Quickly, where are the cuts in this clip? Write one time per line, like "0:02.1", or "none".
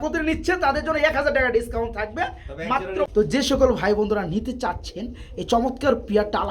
0:02.6